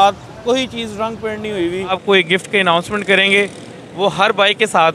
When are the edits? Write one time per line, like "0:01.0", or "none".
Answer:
0:02.0